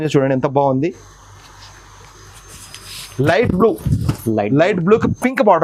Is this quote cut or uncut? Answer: uncut